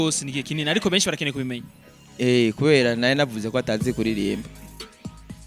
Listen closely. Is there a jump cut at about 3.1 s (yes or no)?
no